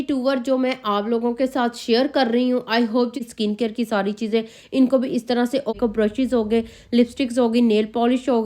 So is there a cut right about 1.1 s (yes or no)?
no